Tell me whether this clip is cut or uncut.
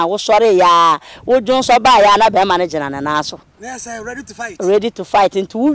uncut